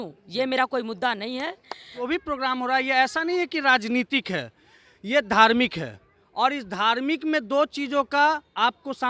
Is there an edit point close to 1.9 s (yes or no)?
yes